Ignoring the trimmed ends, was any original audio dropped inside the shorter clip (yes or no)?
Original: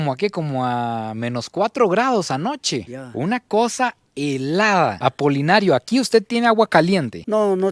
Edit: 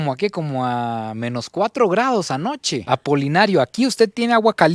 yes